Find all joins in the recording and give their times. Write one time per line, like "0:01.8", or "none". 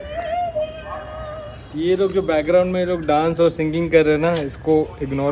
none